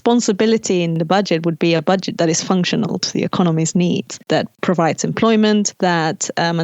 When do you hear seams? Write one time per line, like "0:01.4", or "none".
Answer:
0:01.0
0:04.2
0:05.7